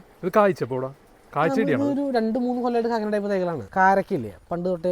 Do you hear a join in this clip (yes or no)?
yes